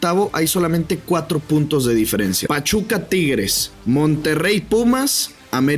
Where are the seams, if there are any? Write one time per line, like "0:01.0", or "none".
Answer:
0:02.4
0:03.6